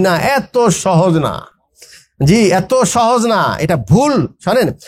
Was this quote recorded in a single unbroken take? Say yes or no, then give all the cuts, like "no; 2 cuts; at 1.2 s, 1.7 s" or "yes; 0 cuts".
yes; 0 cuts